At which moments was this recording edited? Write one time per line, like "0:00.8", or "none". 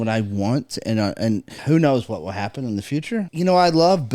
0:01.5
0:03.3